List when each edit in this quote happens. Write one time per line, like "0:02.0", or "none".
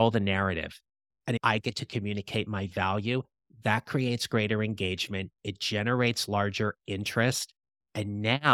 0:01.4